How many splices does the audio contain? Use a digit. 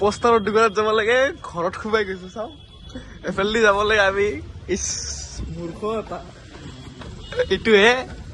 1